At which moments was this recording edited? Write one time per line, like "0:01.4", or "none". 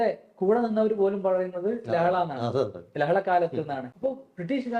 0:03.9